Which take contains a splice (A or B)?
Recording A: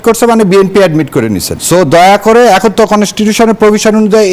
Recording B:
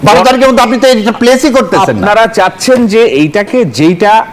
A